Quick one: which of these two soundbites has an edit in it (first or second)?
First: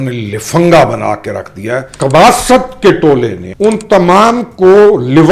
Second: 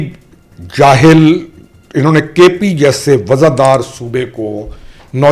first